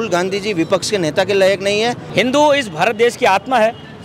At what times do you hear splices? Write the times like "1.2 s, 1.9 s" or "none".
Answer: 2.0 s